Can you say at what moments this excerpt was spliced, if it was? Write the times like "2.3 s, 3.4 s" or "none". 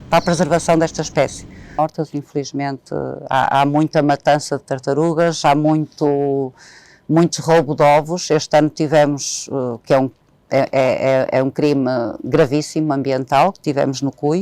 1.8 s